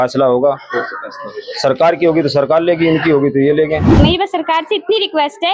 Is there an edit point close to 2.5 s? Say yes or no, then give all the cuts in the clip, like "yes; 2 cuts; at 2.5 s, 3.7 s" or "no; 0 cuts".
no; 1 cut; at 3.9 s